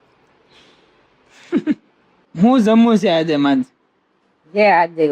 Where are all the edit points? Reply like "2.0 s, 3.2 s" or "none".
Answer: 2.4 s